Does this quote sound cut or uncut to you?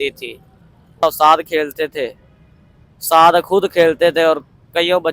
cut